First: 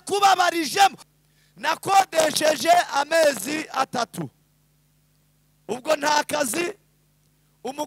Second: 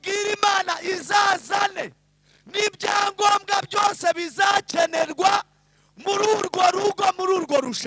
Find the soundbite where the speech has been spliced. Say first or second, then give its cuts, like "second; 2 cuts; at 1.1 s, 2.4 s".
first; 1 cut; at 1.1 s